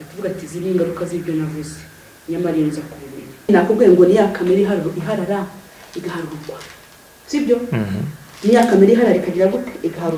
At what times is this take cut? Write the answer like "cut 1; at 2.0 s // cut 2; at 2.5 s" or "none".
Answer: cut 1; at 3.5 s